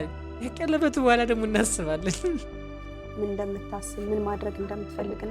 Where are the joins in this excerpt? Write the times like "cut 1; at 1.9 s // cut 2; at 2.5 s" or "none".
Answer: cut 1; at 2.5 s